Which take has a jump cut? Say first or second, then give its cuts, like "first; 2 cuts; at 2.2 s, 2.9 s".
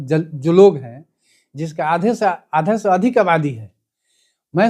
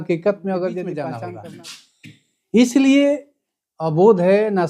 second; 1 cut; at 1.1 s